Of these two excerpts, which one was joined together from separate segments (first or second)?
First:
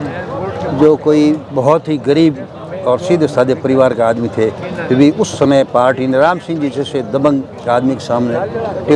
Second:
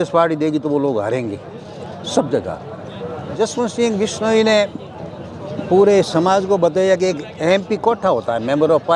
second